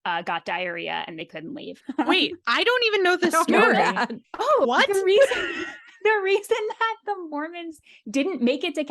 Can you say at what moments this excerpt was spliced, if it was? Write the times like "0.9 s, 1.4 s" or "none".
1.7 s, 4.7 s